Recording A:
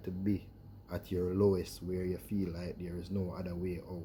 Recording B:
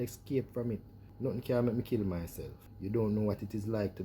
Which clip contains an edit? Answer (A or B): B